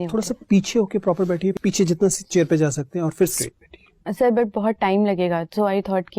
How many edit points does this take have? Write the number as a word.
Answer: two